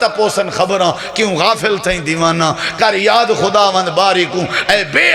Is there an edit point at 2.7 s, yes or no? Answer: no